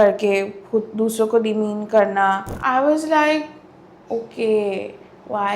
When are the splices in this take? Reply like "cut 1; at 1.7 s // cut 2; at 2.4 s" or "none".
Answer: cut 1; at 2.5 s